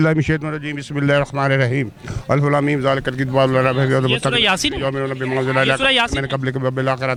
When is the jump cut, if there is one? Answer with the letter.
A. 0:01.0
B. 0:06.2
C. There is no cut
C